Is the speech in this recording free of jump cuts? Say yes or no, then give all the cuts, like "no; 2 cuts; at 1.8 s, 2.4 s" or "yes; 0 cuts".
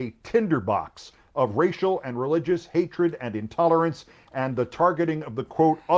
yes; 0 cuts